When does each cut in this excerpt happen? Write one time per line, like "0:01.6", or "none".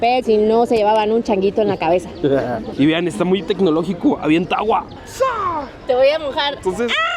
none